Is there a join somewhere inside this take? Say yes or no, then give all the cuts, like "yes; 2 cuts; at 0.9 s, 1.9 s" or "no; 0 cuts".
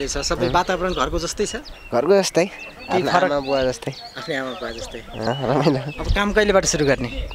yes; 1 cut; at 5.3 s